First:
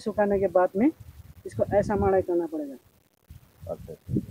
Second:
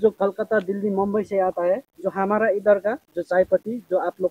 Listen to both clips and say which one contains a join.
second; 2 cuts; at 1.9 s, 3.1 s

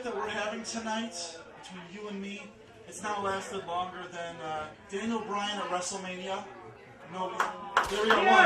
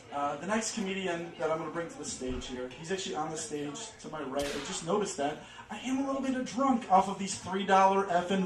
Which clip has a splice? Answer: second; 1 cut; at 5.1 s

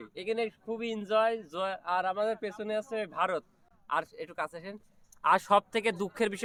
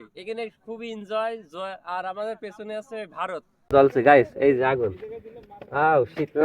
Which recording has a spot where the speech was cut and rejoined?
second; 1 cut; at 3.7 s

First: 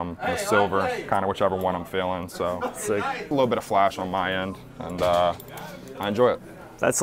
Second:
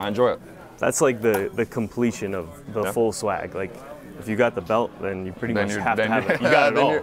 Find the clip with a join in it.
first; 1 cut; at 3.2 s

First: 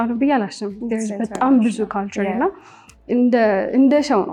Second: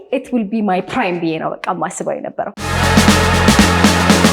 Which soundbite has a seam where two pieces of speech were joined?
second; 1 cut; at 2.5 s

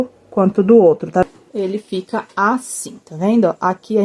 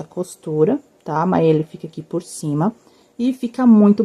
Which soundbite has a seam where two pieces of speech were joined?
first; 1 cut; at 1.2 s

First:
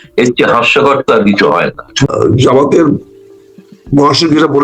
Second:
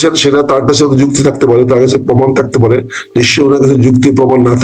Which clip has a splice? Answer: first; 1 cut; at 1.9 s

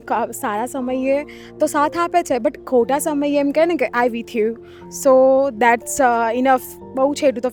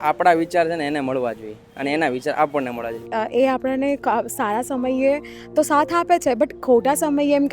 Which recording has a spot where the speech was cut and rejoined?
second; 1 cut; at 3.0 s

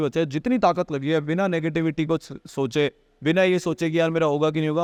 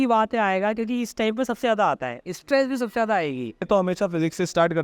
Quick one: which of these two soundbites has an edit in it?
second; 1 cut; at 3.7 s

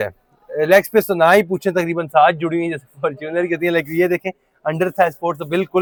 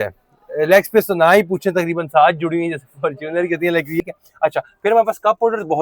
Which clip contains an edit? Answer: second; 1 cut; at 4.0 s

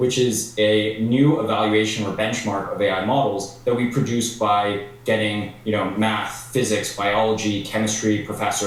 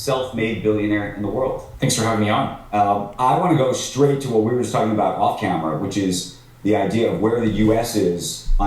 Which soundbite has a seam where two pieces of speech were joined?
second; 2 cuts; at 1.7 s, 3.1 s

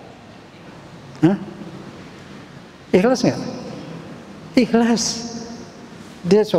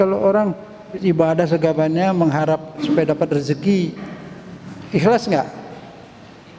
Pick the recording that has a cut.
second; 2 cuts; at 1.0 s, 2.8 s

